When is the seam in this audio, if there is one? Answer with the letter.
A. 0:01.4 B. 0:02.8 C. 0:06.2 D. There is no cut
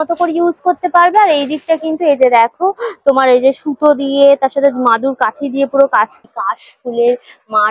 C